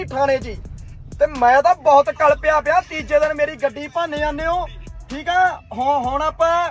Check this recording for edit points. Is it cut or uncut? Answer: uncut